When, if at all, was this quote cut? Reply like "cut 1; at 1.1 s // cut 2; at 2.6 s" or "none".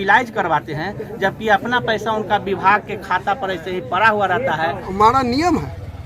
cut 1; at 4.9 s

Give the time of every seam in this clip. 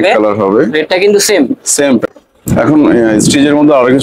cut 1; at 2.0 s

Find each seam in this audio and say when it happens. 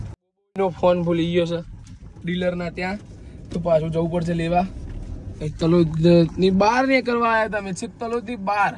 none

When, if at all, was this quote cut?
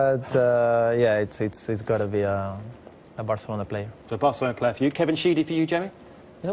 cut 1; at 5.1 s

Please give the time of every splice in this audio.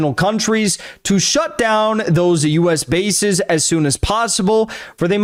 none

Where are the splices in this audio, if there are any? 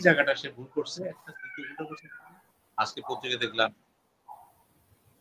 cut 1; at 2.1 s

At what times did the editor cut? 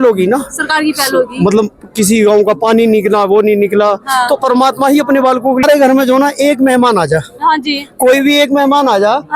cut 1; at 5.6 s

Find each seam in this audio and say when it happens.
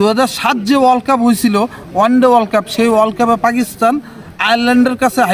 none

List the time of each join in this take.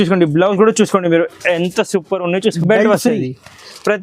cut 1; at 2.6 s

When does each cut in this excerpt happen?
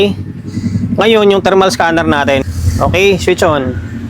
cut 1; at 2.5 s

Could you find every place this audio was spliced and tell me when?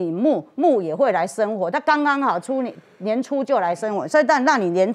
none

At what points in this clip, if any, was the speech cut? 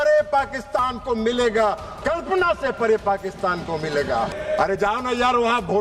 cut 1; at 4.3 s

